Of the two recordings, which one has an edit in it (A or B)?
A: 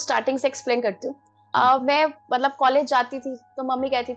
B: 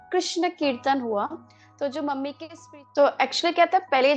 B